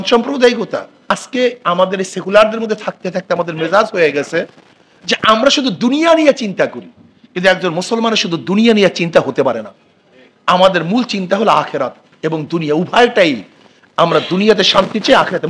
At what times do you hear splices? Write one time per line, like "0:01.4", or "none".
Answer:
0:01.1

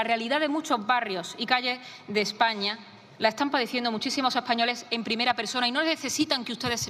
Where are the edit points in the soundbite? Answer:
none

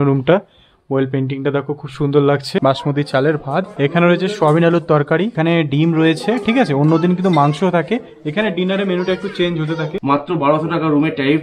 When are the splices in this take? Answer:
0:02.5
0:03.7
0:05.3
0:09.9

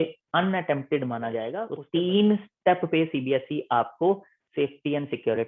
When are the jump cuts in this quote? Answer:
0:01.5

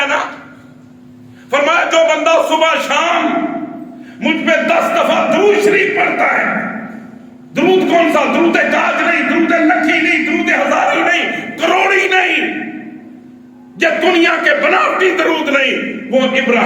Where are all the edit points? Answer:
none

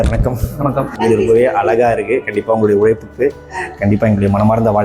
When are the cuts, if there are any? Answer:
0:00.9

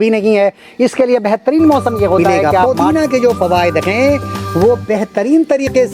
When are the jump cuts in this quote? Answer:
0:02.7

